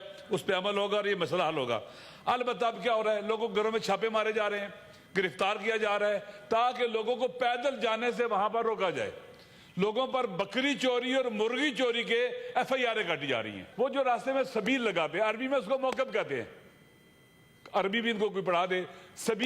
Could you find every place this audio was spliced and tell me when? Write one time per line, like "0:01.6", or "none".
0:13.6